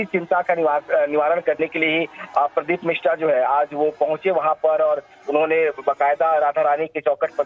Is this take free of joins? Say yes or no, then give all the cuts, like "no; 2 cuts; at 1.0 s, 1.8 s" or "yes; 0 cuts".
no; 1 cut; at 1.9 s